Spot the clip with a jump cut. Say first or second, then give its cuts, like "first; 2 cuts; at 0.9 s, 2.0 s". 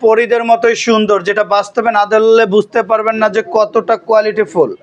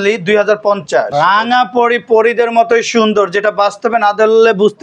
second; 1 cut; at 1.1 s